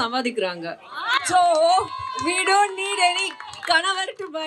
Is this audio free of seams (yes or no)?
yes